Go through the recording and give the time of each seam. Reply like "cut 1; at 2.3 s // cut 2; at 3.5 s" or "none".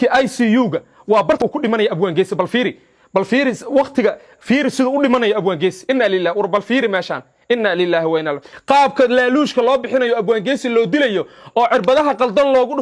cut 1; at 1.4 s // cut 2; at 8.5 s